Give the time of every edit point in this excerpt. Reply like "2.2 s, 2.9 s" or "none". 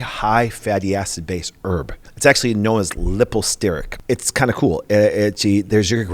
2.0 s, 3.9 s